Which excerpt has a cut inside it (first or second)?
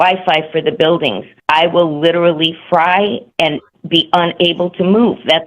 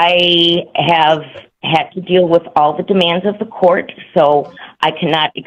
first